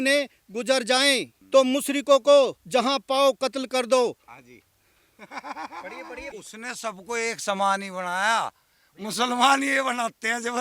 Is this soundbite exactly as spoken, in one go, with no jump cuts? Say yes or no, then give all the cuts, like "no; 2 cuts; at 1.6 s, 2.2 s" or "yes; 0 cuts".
no; 2 cuts; at 1.3 s, 6.2 s